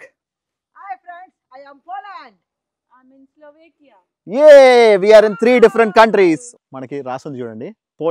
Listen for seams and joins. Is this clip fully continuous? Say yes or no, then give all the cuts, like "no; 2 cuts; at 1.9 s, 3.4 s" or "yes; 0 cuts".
no; 1 cut; at 6.5 s